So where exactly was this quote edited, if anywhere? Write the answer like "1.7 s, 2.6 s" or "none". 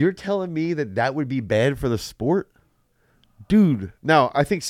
none